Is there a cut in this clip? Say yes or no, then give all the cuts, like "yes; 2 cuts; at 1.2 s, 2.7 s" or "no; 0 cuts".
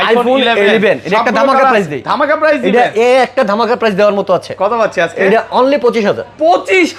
no; 0 cuts